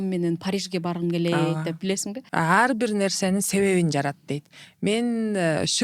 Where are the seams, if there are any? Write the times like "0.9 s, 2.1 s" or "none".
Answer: 2.2 s